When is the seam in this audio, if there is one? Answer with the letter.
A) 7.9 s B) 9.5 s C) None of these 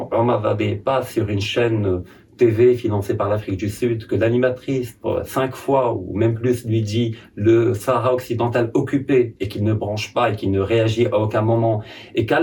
C